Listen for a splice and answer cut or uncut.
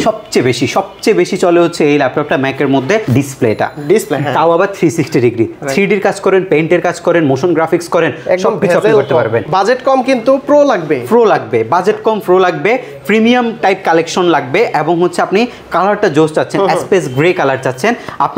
cut